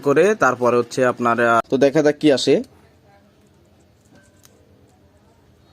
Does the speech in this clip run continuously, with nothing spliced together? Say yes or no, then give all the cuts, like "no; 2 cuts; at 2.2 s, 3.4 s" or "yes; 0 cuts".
no; 1 cut; at 1.6 s